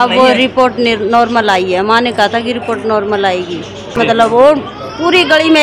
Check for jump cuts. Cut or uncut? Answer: cut